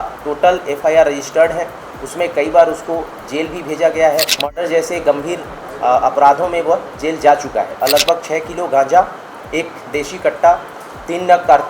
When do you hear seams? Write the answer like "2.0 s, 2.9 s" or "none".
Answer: 4.4 s, 7.8 s